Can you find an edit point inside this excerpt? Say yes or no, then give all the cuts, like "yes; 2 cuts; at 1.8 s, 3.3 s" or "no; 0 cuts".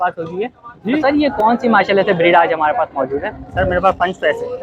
yes; 1 cut; at 1.0 s